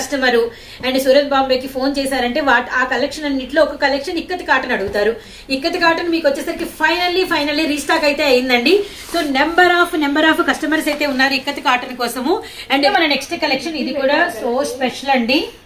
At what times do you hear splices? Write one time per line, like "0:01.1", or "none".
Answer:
0:12.9